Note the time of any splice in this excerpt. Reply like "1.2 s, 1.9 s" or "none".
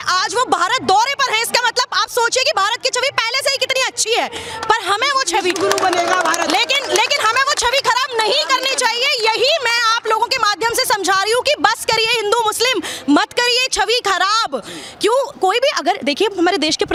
none